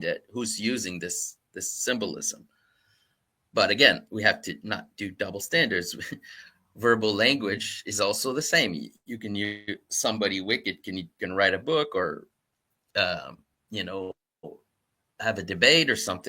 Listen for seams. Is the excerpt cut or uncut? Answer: uncut